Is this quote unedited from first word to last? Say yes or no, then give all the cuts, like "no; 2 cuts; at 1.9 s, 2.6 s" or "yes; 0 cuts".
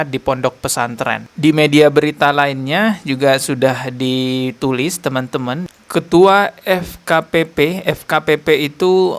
no; 2 cuts; at 1.3 s, 5.7 s